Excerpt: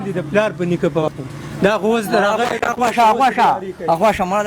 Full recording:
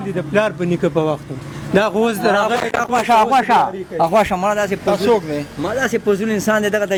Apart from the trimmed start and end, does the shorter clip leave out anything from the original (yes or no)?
yes